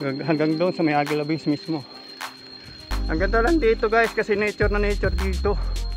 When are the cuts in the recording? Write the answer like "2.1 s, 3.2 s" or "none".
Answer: 2.9 s